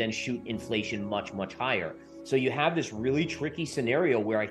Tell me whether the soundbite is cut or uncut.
uncut